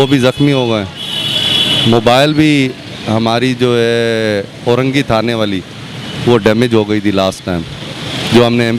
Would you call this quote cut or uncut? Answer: uncut